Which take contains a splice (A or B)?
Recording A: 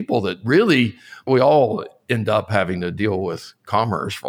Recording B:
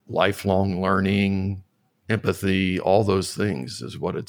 A